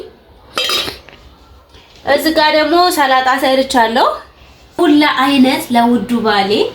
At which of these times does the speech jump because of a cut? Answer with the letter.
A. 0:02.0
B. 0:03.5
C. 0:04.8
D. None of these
C